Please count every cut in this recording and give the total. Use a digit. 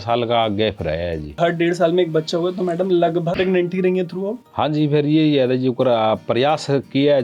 2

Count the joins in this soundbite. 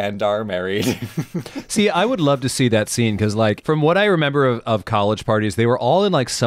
1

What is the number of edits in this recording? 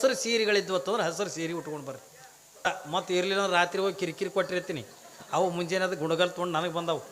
1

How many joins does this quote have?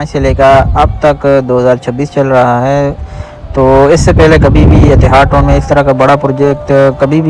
0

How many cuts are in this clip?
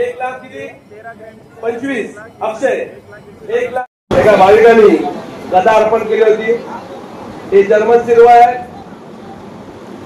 1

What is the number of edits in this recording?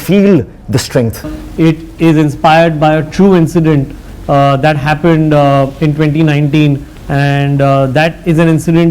2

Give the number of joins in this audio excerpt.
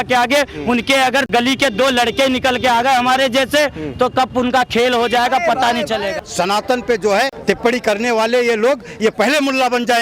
3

